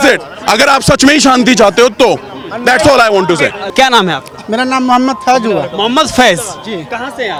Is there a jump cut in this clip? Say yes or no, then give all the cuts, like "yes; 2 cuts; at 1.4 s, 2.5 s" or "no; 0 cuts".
no; 0 cuts